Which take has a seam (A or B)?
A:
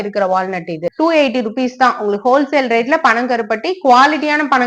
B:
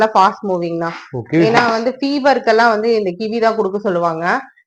A